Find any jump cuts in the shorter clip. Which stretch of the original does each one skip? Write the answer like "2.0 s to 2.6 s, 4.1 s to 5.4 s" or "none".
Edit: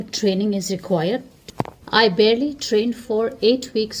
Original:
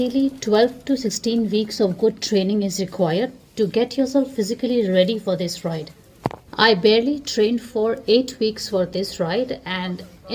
3.4 s to 6.0 s